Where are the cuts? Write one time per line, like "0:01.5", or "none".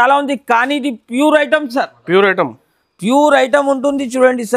none